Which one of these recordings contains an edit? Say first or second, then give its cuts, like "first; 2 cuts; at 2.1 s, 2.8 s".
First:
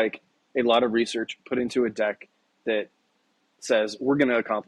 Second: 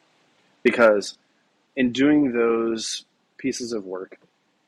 second; 1 cut; at 1.6 s